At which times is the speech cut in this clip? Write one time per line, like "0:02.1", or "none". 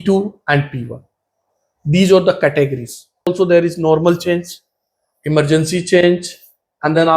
0:03.3